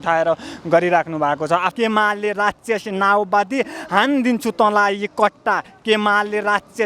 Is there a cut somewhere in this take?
yes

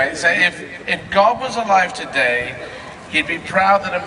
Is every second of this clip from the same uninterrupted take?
yes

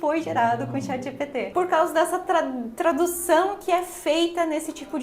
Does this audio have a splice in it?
yes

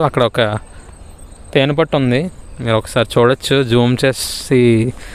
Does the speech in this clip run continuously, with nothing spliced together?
yes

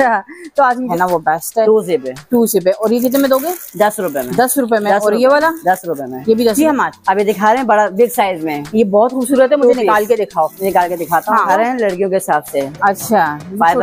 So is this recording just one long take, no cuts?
no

